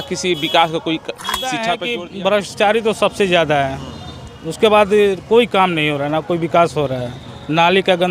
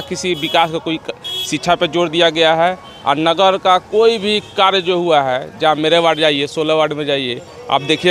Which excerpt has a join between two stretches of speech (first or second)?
first